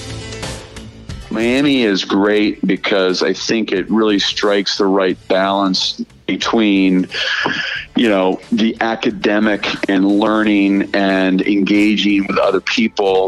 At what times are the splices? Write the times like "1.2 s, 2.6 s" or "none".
1.0 s